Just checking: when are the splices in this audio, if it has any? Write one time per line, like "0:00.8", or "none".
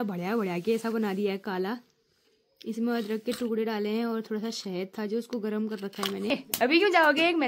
0:06.3